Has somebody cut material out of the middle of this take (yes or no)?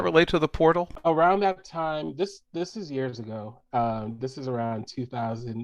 yes